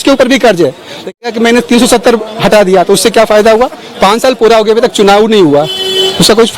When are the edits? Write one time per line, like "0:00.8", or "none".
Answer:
0:01.3